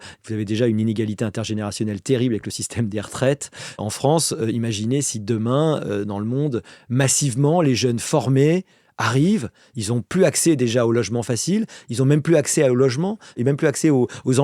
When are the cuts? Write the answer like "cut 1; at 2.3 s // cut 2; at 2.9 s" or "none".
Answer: cut 1; at 3.8 s // cut 2; at 13.4 s